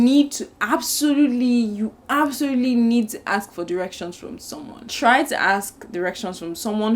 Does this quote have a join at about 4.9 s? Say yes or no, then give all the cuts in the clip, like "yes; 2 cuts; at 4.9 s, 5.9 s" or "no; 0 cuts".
yes; 1 cut; at 4.9 s